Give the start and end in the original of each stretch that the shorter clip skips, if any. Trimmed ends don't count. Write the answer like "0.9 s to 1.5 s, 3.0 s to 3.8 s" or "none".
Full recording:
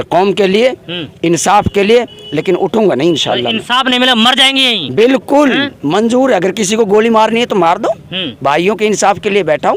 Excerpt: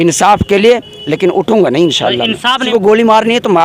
3.9 s to 6.7 s